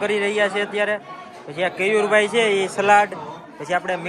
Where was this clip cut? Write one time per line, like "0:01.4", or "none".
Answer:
none